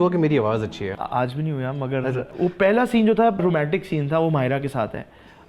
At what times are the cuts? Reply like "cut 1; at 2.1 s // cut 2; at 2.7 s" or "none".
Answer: cut 1; at 0.9 s // cut 2; at 2.3 s // cut 3; at 3.4 s

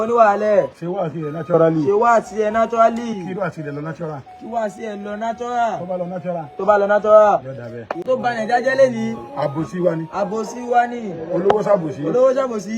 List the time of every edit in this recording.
cut 1; at 8.1 s

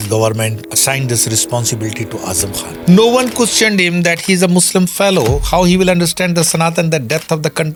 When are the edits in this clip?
none

